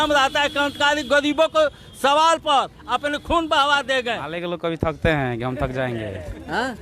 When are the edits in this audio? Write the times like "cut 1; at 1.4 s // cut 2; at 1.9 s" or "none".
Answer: cut 1; at 4.3 s